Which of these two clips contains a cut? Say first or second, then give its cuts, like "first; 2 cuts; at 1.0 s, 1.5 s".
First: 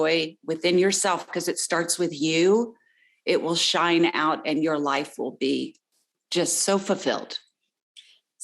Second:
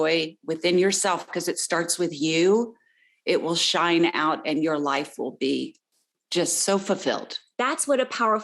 second; 1 cut; at 7.4 s